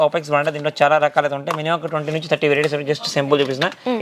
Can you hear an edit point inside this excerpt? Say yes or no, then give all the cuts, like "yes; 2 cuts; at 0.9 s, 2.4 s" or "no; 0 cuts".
no; 0 cuts